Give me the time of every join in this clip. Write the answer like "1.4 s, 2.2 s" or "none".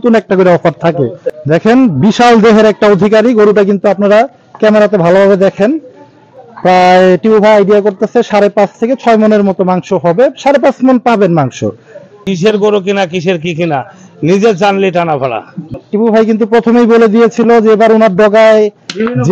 1.3 s, 12.3 s, 15.7 s